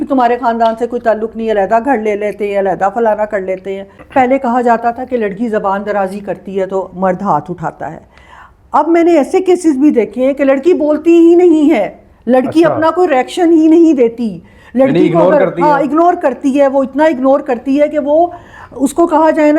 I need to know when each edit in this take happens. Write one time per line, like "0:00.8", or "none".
0:04.0

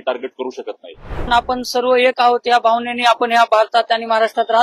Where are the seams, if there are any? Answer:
0:01.3

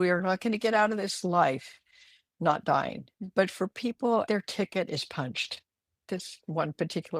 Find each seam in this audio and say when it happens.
0:03.1
0:04.2
0:06.0

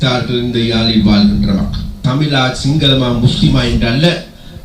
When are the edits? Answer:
0:02.0

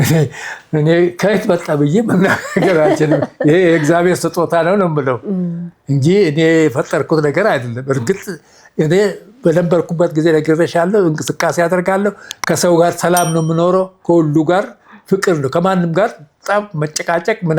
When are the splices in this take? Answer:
none

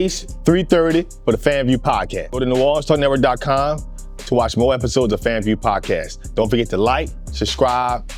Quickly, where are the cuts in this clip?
none

